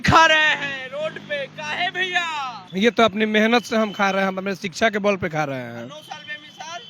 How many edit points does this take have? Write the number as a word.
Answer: one